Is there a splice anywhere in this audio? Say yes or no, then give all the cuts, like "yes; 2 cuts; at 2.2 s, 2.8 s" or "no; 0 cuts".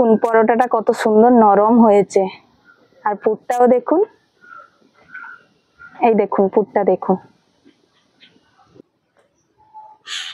yes; 1 cut; at 8.8 s